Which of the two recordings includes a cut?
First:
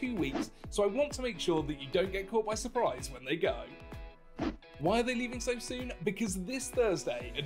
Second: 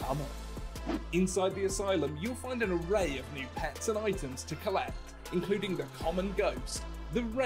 second; 2 cuts; at 2.8 s, 6.1 s

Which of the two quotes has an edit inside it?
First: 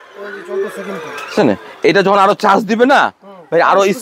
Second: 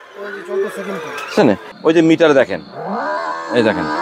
second; 1 cut; at 1.7 s

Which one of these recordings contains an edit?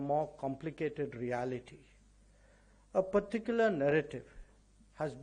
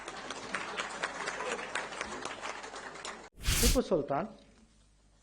second; 1 cut; at 3.4 s

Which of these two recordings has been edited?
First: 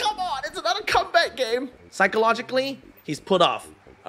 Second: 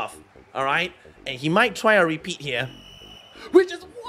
first; 1 cut; at 1.8 s

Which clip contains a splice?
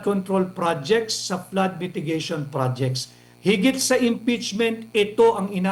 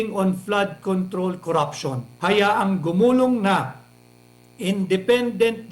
second; 1 cut; at 2.0 s

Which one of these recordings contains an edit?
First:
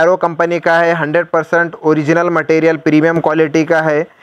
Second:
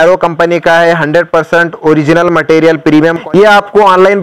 second; 1 cut; at 3.2 s

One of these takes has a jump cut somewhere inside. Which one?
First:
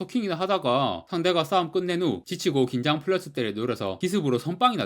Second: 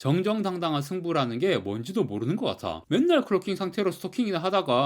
second; 1 cut; at 2.7 s

